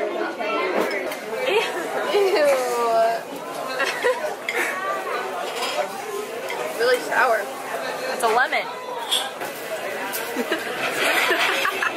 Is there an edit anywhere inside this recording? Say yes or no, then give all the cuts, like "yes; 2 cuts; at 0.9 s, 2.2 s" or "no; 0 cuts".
yes; 1 cut; at 4.0 s